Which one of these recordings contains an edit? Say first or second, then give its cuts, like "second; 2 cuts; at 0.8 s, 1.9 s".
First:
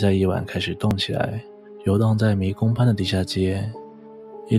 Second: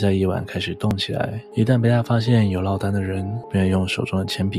second; 2 cuts; at 1.4 s, 3.4 s